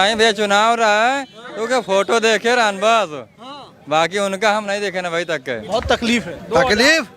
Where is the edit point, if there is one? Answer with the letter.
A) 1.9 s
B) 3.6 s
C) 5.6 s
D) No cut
C